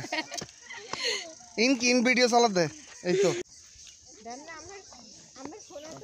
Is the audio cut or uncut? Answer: cut